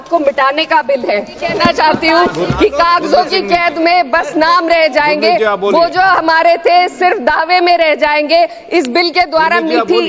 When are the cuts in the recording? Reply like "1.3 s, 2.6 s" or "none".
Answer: 1.5 s